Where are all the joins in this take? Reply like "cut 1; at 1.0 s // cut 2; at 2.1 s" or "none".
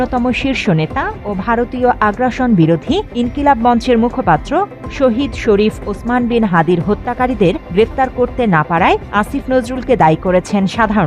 none